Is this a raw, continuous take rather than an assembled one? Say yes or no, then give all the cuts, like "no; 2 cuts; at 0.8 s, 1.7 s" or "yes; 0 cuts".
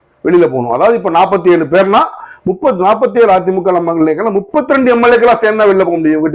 yes; 0 cuts